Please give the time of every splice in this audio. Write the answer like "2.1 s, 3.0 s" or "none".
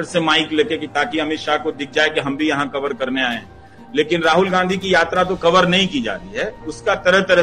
none

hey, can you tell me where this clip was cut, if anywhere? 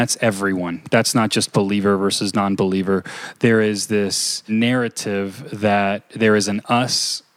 4.5 s, 6.1 s

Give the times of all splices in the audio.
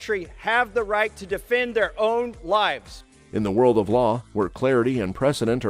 none

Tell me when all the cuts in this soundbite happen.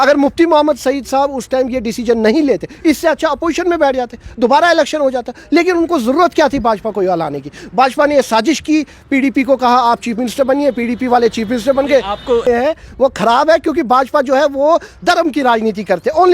12.4 s

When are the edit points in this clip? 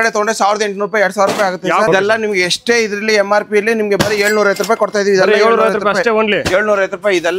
1.9 s

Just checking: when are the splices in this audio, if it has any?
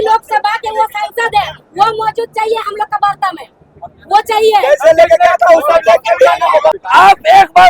6.8 s

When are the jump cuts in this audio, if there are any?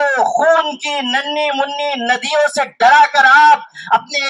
none

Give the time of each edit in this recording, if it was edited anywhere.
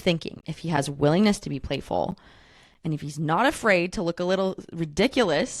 none

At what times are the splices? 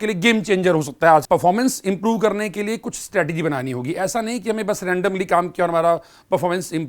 1.2 s

